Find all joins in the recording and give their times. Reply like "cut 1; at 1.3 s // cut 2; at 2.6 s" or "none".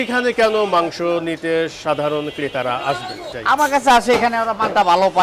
cut 1; at 3.3 s